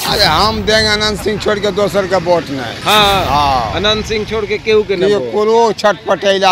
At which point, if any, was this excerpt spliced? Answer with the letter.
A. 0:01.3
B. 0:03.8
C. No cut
C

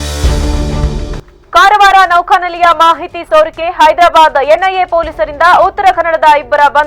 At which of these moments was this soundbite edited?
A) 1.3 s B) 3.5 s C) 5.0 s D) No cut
A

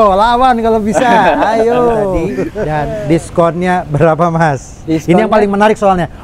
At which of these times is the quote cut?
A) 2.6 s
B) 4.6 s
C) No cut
A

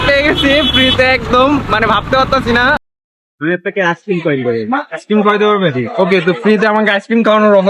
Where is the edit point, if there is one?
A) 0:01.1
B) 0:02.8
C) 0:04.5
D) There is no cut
B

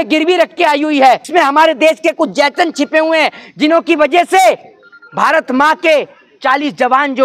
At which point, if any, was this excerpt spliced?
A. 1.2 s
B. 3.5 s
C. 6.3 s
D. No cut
A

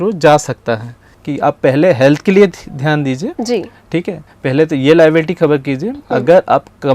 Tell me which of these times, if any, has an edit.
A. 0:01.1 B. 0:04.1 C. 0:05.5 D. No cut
A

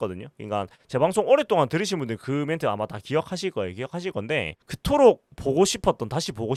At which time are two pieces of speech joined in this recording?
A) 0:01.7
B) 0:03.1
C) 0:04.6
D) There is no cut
D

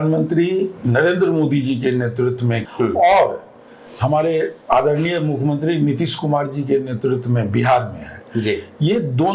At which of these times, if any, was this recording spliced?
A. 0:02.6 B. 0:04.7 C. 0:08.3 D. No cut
A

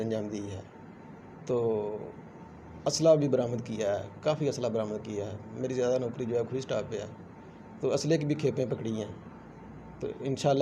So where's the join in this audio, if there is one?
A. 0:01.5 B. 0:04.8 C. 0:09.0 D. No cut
D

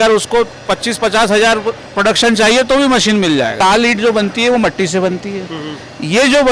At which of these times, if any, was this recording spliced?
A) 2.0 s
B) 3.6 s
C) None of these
B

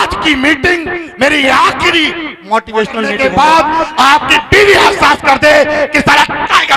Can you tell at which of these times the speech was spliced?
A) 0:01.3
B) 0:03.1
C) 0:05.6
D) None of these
B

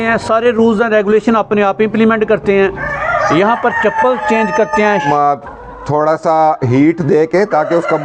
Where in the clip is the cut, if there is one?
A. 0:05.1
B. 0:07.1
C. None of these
A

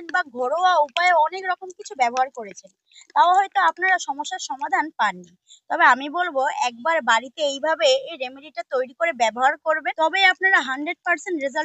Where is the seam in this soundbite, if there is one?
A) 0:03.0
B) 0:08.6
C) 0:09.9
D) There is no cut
C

